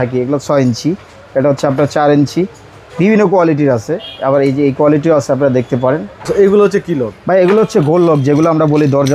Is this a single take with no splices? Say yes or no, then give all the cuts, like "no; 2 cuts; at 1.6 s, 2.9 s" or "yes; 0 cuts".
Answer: no; 1 cut; at 6.1 s